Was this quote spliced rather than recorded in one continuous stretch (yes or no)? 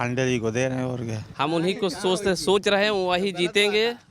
yes